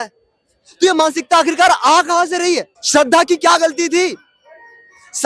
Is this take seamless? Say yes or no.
no